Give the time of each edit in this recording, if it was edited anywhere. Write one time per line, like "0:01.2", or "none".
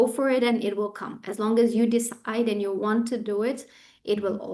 none